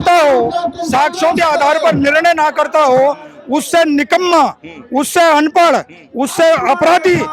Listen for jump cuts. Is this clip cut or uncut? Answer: uncut